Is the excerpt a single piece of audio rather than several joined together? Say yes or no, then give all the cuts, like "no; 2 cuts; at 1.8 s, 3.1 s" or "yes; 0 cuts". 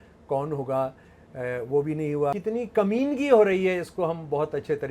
no; 1 cut; at 2.3 s